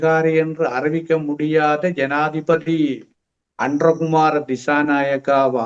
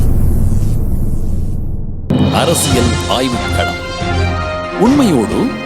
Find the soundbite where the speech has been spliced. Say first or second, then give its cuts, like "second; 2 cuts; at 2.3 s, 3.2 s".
second; 1 cut; at 2.1 s